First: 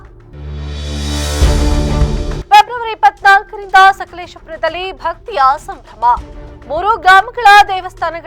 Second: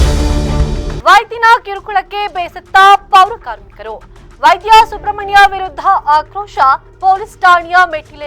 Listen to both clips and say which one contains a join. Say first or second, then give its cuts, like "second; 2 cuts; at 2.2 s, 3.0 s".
second; 1 cut; at 1.0 s